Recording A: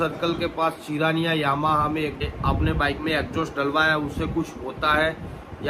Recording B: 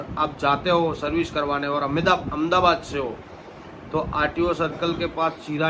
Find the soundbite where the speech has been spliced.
A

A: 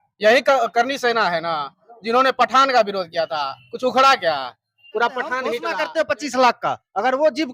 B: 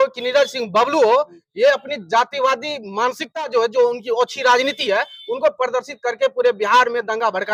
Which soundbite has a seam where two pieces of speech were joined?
A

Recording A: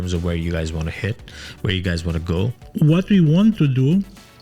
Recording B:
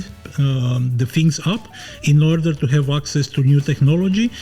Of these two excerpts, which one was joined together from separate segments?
A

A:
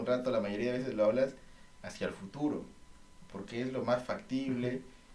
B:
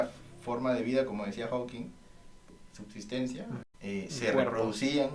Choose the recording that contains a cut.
B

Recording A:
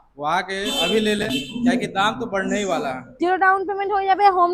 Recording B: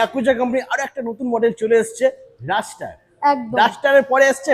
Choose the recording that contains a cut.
A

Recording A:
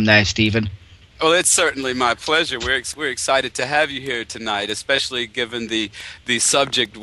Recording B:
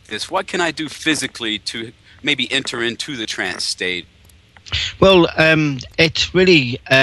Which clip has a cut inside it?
B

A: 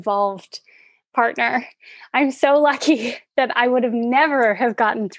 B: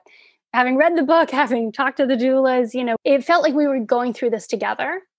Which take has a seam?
B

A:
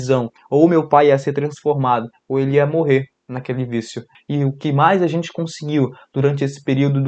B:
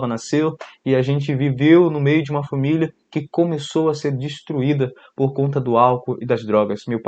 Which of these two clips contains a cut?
A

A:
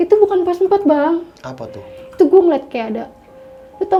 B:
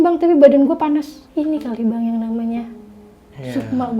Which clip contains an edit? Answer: B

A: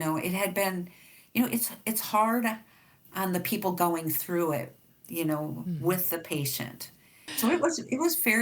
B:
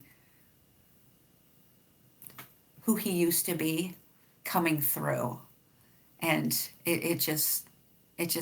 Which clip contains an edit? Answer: A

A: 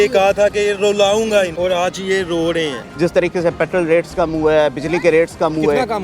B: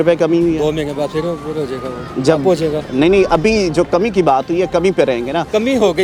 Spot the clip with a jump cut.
A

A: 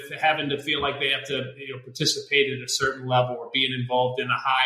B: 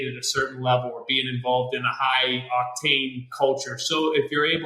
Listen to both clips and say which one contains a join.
B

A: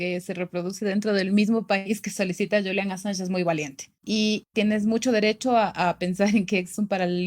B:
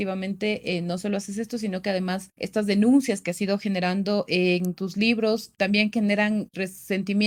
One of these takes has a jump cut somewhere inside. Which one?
A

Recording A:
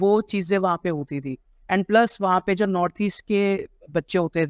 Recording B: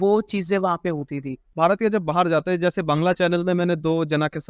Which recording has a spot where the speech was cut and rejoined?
B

